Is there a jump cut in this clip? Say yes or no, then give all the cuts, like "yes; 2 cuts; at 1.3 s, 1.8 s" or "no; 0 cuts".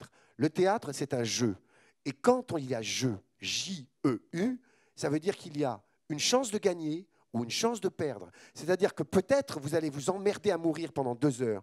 no; 0 cuts